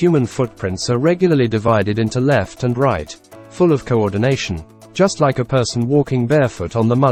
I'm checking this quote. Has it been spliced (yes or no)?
no